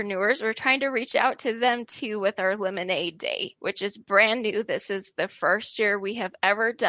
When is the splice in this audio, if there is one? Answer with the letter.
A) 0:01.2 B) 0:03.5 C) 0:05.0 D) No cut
B